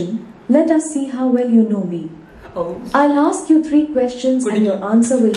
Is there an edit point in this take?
no; 0 cuts

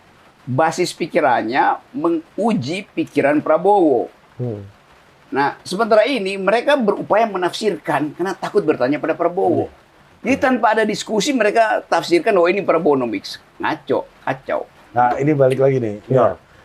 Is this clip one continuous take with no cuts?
yes; 0 cuts

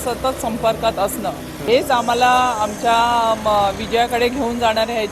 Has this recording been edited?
yes; 1 cut; at 1.6 s

